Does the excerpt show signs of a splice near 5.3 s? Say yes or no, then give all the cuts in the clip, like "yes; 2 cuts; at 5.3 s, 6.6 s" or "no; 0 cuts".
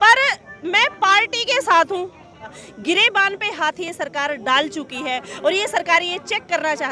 no; 1 cut; at 2.7 s